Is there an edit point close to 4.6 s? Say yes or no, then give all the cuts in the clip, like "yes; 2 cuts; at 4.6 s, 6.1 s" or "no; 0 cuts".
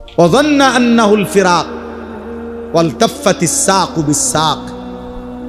yes; 1 cut; at 4.6 s